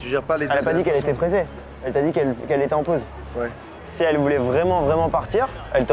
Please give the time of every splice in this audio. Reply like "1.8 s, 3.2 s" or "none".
none